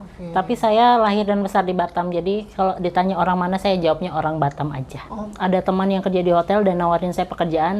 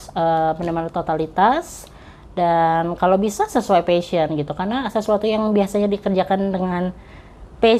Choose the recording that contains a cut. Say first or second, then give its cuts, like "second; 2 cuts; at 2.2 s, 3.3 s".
first; 1 cut; at 5.3 s